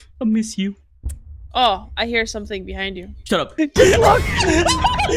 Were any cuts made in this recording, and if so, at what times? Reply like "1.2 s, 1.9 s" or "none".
3.5 s